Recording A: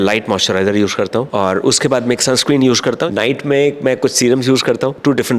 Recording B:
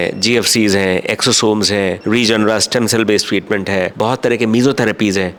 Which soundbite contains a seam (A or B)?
A